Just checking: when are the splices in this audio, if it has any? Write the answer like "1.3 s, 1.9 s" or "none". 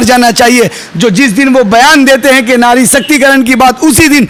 none